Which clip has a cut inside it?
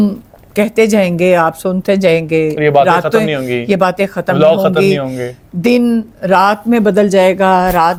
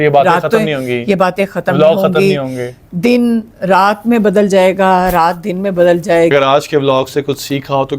second; 1 cut; at 6.3 s

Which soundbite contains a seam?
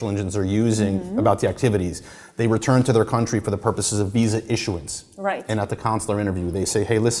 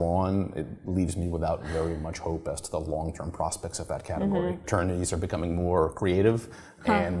second; 1 cut; at 4.7 s

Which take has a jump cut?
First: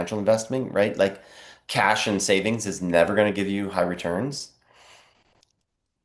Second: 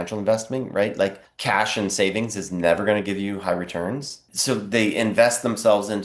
second; 2 cuts; at 1.3 s, 4.3 s

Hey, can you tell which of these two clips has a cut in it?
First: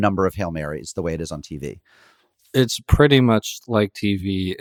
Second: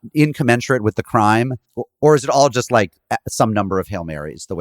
second; 1 cut; at 1.6 s

